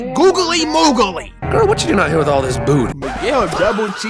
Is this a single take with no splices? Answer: no; 1 cut; at 3.0 s

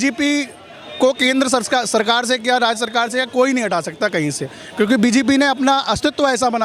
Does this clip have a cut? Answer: no; 0 cuts

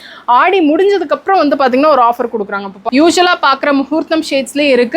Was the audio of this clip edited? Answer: yes; 1 cut; at 2.7 s

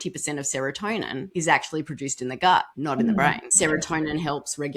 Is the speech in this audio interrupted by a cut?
yes; 3 cuts; at 1.3 s, 2.7 s, 3.4 s

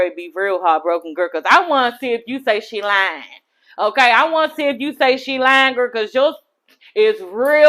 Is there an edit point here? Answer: no; 0 cuts

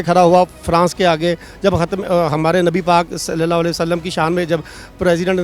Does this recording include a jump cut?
no; 0 cuts

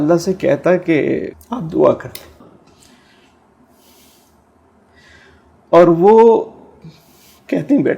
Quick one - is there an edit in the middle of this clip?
yes; 2 cuts; at 1.4 s, 2.4 s

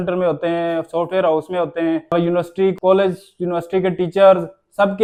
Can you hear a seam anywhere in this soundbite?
no; 0 cuts

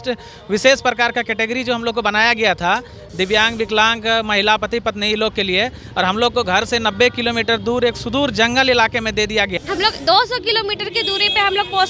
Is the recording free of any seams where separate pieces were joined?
no; 1 cut; at 9.5 s

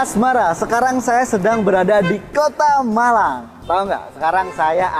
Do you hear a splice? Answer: no; 0 cuts

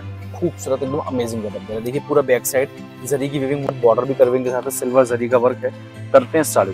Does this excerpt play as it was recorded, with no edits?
no; 1 cut; at 3.7 s

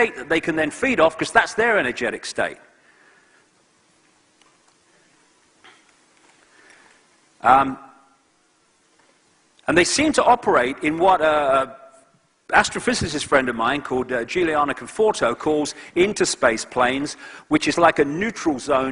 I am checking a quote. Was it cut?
yes; 1 cut; at 14.1 s

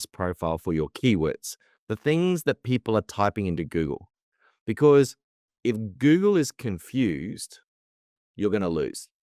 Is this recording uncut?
yes; 0 cuts

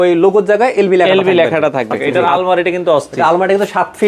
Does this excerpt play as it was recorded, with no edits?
no; 1 cut; at 2.1 s

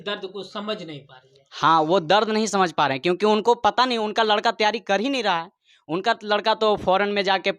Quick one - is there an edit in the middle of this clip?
no; 0 cuts

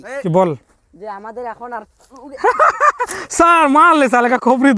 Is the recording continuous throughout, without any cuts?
yes; 0 cuts

